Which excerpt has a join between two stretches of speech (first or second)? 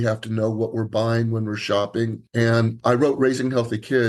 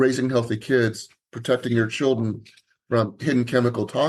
first